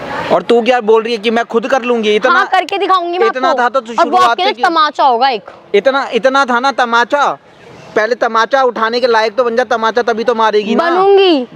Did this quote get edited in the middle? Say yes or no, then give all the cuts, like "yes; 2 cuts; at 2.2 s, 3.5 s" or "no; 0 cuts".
no; 0 cuts